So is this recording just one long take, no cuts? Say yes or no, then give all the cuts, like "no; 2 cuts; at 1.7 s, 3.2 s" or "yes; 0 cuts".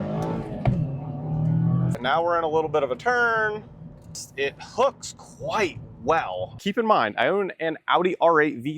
no; 3 cuts; at 1.9 s, 4.2 s, 6.6 s